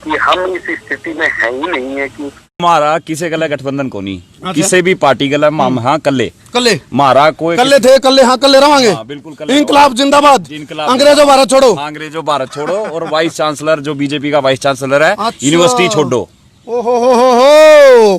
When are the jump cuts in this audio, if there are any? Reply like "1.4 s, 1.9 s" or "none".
2.6 s